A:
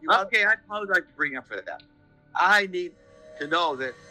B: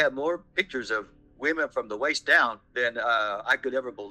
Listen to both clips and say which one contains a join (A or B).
A